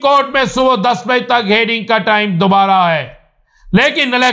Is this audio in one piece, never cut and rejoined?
yes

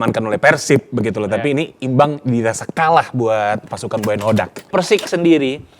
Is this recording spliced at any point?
yes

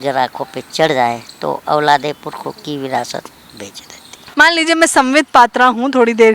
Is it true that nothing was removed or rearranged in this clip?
no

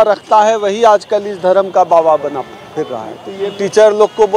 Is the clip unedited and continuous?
no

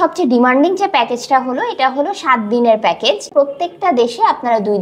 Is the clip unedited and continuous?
no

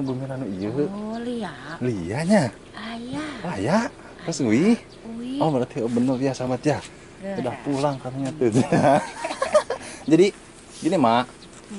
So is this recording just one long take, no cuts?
yes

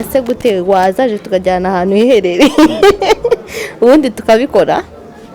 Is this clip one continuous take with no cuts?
yes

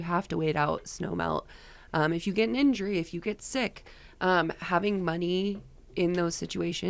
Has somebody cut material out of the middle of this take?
no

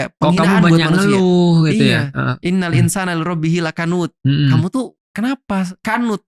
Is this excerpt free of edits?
yes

